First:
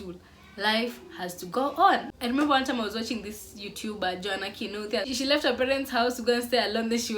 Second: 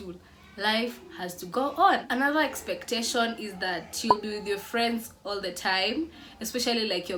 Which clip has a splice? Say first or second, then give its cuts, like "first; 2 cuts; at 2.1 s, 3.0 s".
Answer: first; 1 cut; at 2.1 s